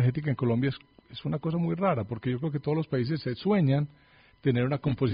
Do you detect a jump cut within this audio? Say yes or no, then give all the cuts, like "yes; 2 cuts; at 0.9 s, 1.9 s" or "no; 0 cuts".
no; 0 cuts